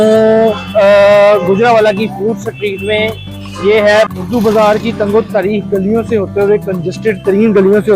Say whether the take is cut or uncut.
cut